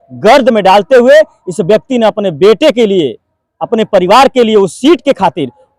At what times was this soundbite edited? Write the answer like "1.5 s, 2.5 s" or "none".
none